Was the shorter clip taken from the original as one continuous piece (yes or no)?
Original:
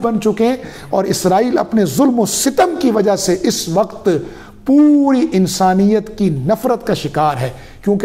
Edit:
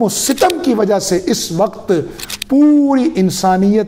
yes